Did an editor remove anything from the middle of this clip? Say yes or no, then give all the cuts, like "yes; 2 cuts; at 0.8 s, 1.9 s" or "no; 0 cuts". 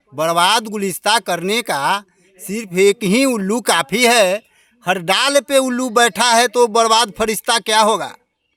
no; 0 cuts